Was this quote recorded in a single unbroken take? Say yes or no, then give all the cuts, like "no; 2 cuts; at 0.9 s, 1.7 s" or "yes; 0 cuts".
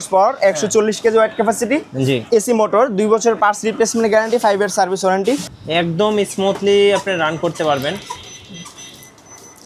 no; 1 cut; at 5.5 s